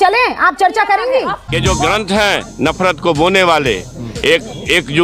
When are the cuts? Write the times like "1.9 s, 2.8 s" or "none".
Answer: 1.4 s